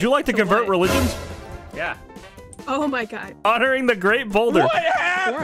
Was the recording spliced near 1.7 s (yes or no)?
no